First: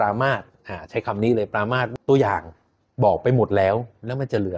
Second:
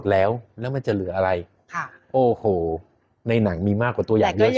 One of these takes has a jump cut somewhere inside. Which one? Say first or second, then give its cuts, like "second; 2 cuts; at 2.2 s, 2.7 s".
first; 1 cut; at 1.9 s